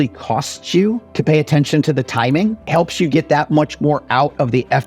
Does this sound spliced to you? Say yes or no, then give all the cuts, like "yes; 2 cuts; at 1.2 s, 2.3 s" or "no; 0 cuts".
yes; 2 cuts; at 1.1 s, 2.6 s